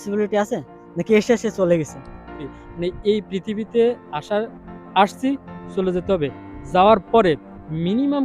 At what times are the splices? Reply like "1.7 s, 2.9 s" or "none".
2.5 s